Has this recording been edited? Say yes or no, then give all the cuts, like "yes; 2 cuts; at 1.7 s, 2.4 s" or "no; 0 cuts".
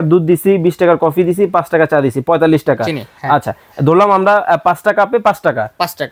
no; 0 cuts